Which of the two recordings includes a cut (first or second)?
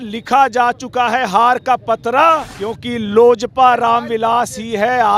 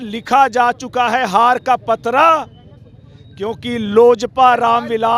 first